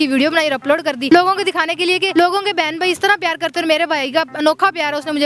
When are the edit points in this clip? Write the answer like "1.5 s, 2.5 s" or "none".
1.0 s, 2.1 s